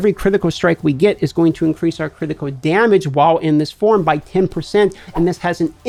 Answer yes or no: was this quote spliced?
no